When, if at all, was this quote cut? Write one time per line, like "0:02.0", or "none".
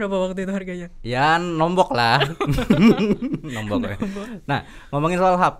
none